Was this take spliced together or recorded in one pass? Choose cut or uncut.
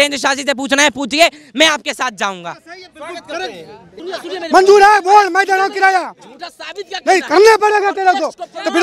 uncut